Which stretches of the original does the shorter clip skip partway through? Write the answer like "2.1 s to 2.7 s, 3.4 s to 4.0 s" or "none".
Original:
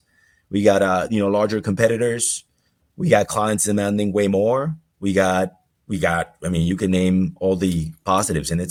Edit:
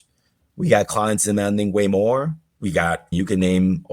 5.0 s to 6.1 s

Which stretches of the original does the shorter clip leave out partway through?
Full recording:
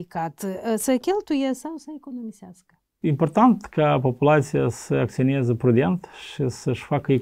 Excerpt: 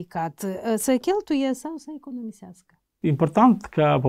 none

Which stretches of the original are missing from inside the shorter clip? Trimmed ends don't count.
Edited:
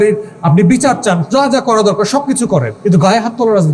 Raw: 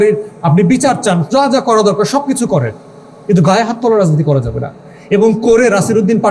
2.7 s to 3.2 s

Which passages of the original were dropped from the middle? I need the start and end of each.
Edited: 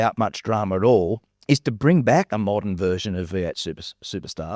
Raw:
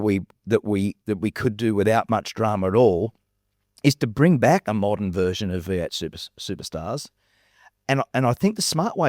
3.2 s to 3.6 s

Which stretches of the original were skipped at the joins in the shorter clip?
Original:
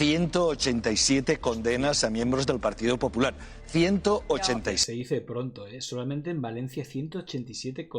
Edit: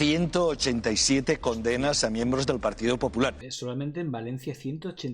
3.5 s to 5.8 s

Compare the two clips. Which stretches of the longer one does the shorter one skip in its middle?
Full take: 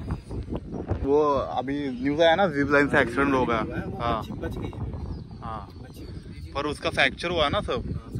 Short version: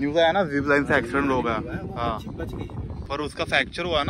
5.0 s to 6.4 s

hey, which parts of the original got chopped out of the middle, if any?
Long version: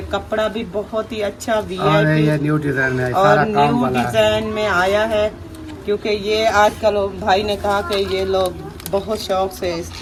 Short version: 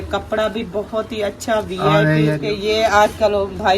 2.4 s to 6.0 s

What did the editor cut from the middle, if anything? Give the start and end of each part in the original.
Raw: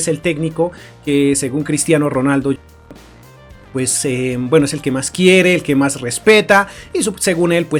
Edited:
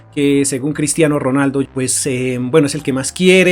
2.6 s to 3.7 s

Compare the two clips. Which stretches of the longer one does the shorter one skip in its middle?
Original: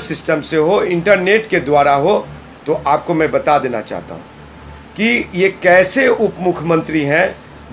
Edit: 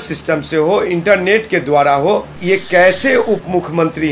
2.3 s to 5.3 s

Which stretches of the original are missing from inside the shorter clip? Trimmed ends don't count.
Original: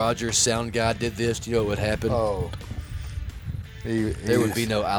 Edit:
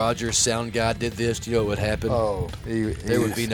2.5 s to 3.7 s

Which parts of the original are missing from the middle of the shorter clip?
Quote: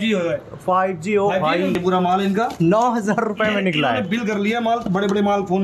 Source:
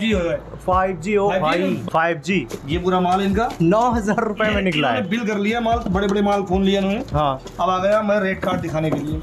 1.8 s to 2.8 s

